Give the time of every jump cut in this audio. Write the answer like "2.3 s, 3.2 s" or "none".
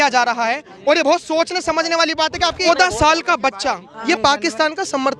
2.7 s, 3.9 s